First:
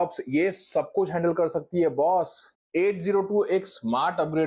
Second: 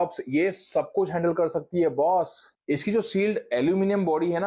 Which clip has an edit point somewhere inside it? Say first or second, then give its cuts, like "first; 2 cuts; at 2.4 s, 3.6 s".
first; 1 cut; at 2.5 s